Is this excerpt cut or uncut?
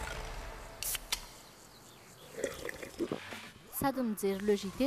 uncut